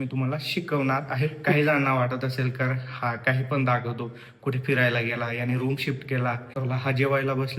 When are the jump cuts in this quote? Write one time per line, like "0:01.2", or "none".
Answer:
0:01.5
0:06.6